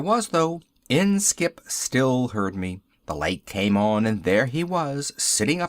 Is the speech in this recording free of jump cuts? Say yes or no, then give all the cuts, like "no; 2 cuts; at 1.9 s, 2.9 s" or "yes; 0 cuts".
no; 1 cut; at 1.5 s